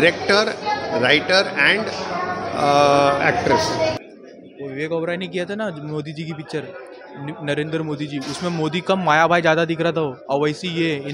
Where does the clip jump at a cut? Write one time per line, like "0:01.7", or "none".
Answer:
0:04.0

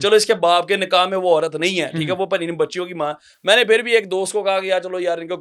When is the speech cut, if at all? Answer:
none

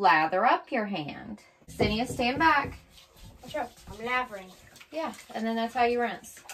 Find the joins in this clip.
0:01.7

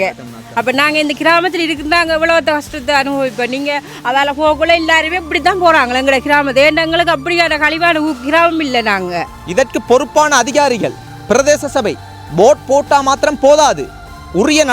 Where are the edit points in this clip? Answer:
0:09.3

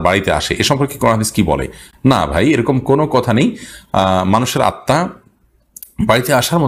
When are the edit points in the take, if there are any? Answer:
none

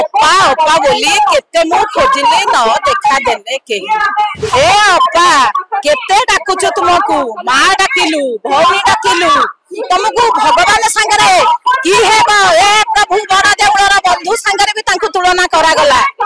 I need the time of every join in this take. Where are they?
none

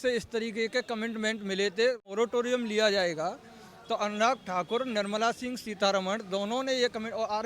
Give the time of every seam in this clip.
0:02.1

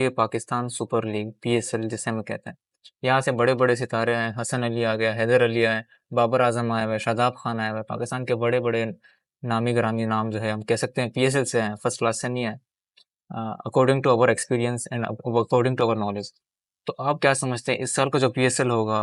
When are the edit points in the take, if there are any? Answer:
none

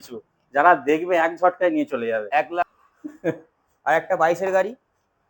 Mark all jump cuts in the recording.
0:02.7

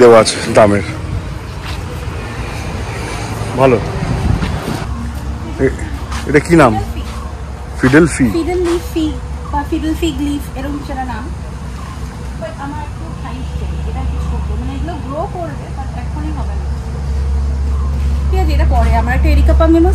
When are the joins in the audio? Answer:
0:04.9

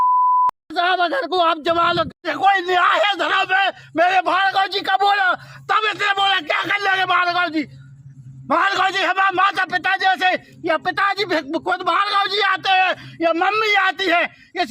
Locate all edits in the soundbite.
0:02.1

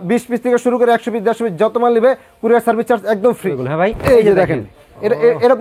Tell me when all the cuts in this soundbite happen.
0:03.5

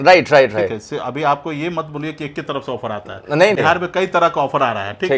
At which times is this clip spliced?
none

